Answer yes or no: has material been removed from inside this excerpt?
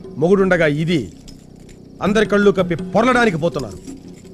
no